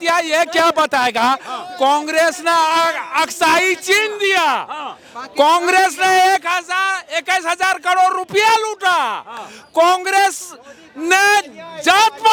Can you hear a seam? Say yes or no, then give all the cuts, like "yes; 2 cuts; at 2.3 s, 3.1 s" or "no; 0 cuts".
no; 0 cuts